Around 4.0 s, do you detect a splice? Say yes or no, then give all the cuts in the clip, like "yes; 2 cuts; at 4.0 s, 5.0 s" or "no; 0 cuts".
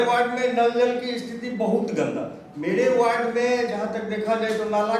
no; 1 cut; at 2.4 s